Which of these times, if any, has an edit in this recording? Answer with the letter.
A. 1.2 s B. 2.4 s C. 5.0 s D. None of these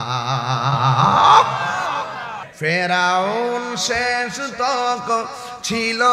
B